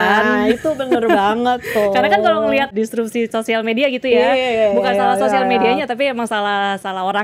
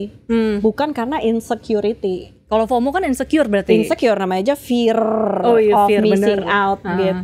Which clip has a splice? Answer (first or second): first